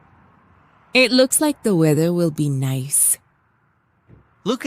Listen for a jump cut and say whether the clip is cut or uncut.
cut